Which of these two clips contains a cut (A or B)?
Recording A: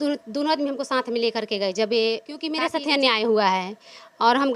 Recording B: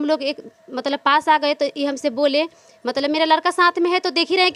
A